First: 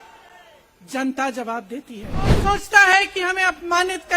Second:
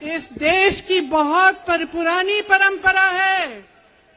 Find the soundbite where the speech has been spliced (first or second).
first